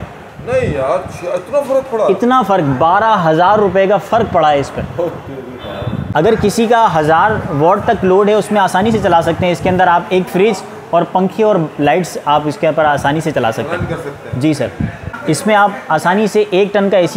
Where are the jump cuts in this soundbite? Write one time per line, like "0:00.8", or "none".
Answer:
0:06.1
0:15.1